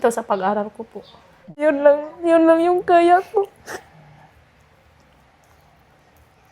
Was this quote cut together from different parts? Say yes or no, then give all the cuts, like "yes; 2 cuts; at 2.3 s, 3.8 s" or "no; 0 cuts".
yes; 1 cut; at 1.6 s